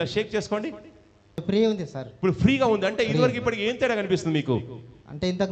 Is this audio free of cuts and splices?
no; 1 cut; at 1.4 s

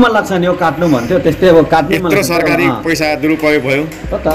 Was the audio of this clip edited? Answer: no; 0 cuts

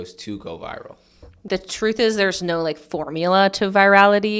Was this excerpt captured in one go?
no; 1 cut; at 1.4 s

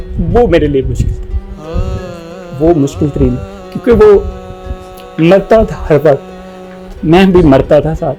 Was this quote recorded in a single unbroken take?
yes; 0 cuts

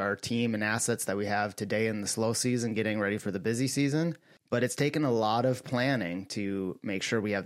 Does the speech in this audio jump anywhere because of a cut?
no; 0 cuts

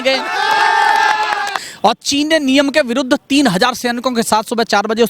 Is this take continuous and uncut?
no; 1 cut; at 1.6 s

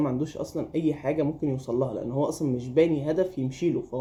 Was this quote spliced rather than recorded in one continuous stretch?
no; 0 cuts

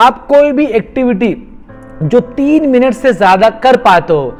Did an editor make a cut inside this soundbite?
no; 0 cuts

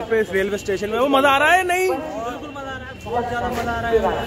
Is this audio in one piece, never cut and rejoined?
yes; 0 cuts

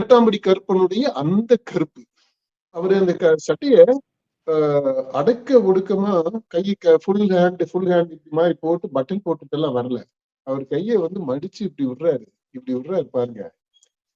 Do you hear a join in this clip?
yes; 1 cut; at 2.8 s

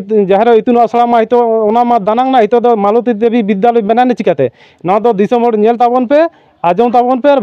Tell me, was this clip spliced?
no; 0 cuts

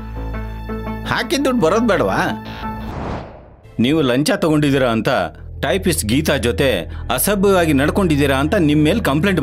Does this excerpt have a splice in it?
yes; 1 cut; at 3.3 s

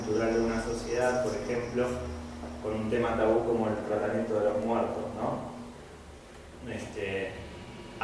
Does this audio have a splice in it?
no; 0 cuts

